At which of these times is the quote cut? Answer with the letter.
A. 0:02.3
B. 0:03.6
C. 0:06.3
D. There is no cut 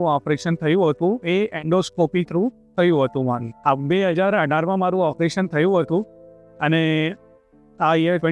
D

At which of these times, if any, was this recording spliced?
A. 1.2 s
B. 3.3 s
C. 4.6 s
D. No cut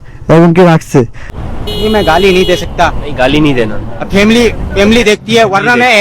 A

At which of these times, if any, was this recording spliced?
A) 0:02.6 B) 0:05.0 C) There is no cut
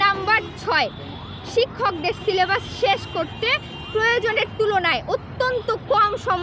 C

